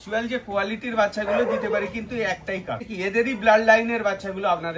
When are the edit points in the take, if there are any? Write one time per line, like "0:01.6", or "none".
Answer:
0:02.9